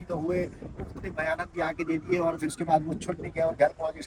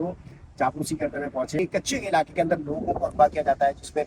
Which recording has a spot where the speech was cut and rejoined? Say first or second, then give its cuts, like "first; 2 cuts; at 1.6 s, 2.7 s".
second; 1 cut; at 1.6 s